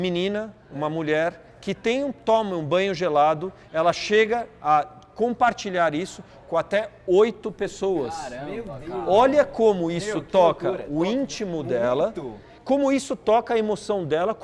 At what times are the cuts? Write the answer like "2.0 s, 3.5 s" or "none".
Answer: none